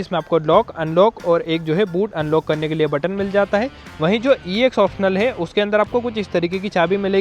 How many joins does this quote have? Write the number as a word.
one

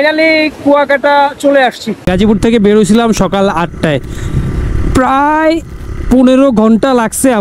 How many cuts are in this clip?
one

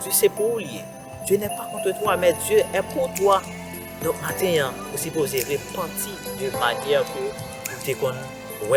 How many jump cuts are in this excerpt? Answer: zero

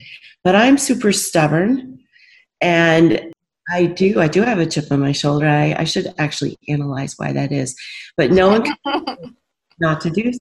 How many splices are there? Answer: one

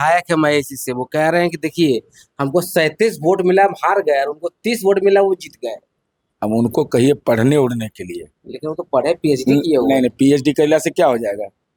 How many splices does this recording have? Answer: zero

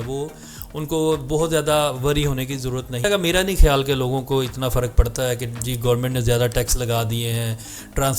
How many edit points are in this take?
one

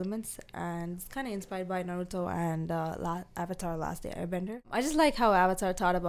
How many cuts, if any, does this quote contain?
one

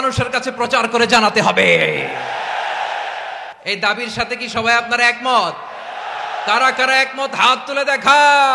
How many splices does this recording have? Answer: one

